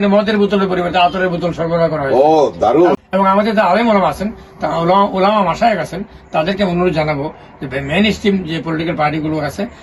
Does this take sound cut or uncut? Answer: cut